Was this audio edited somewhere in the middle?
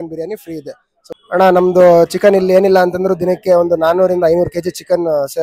yes; 1 cut; at 1.1 s

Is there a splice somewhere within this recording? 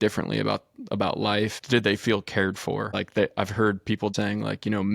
yes; 3 cuts; at 1.6 s, 2.9 s, 4.1 s

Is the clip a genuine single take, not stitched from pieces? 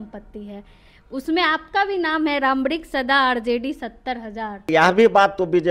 no; 1 cut; at 4.7 s

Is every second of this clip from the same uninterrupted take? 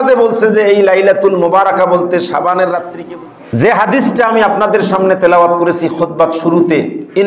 no; 1 cut; at 2.9 s

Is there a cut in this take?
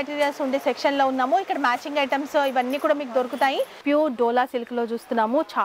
yes; 1 cut; at 3.8 s

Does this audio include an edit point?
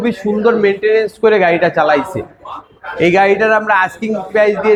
no; 0 cuts

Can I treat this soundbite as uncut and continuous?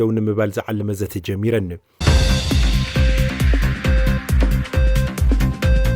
no; 1 cut; at 1.9 s

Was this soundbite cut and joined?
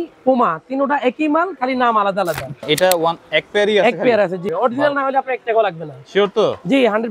yes; 2 cuts; at 2.5 s, 4.4 s

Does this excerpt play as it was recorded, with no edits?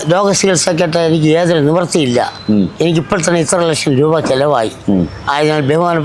yes; 0 cuts

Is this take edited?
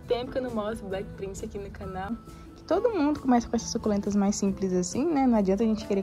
yes; 1 cut; at 2.2 s

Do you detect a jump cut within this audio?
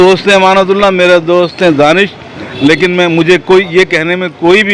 no; 0 cuts

